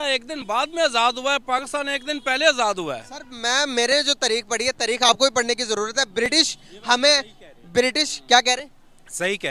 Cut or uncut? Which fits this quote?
uncut